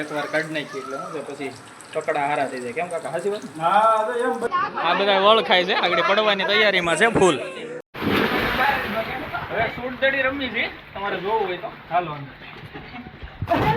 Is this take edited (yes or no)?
yes